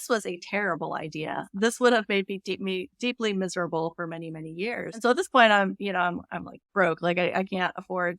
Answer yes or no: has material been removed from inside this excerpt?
yes